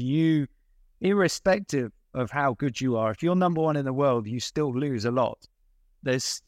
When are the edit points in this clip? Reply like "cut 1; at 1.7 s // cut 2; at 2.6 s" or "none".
none